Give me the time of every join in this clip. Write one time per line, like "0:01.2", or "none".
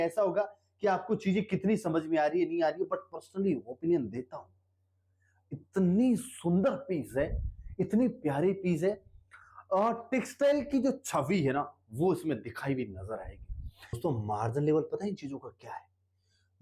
0:14.0